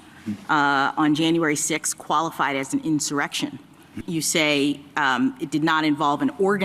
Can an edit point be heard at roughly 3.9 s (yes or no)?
yes